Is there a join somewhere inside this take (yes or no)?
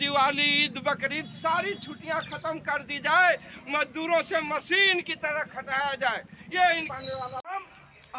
yes